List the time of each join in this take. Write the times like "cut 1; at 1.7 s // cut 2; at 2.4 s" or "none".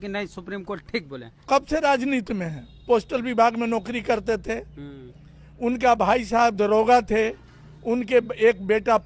cut 1; at 1.4 s

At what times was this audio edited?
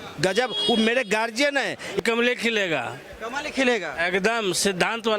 cut 1; at 2.0 s

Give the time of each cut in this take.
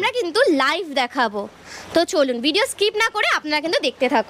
none

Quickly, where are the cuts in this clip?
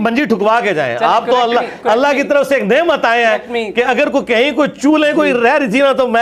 none

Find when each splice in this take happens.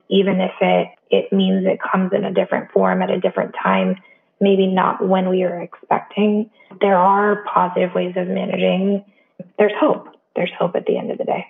cut 1; at 1.0 s // cut 2; at 6.8 s // cut 3; at 9.3 s

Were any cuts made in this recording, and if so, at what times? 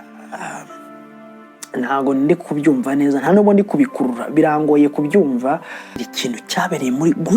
cut 1; at 6.1 s

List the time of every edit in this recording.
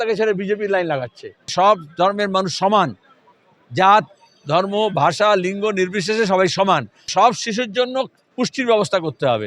cut 1; at 1.5 s // cut 2; at 7.1 s

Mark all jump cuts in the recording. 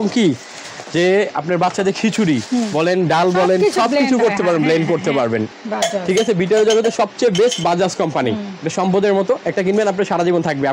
cut 1; at 5.5 s

